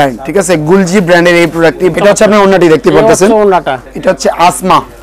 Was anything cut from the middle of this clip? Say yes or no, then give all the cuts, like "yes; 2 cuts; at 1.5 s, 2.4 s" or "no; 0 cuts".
yes; 2 cuts; at 1.9 s, 3.8 s